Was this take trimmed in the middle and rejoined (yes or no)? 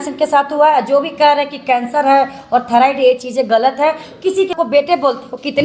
yes